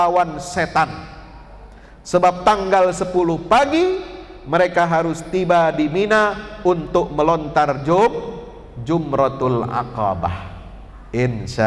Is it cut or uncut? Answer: uncut